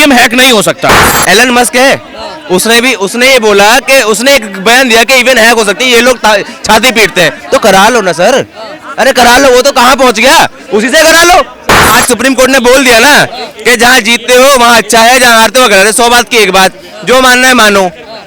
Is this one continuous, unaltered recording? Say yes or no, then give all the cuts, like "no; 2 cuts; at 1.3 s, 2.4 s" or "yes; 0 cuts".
no; 2 cuts; at 1.1 s, 11.9 s